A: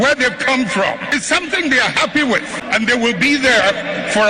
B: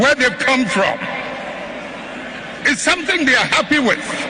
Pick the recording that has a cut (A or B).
A